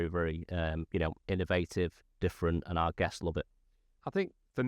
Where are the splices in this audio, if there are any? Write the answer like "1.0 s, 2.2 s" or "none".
none